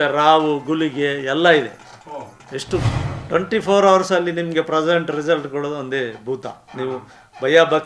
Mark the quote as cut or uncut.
cut